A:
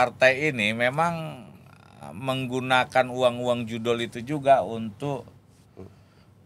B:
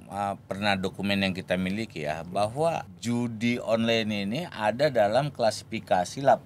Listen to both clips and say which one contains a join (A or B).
B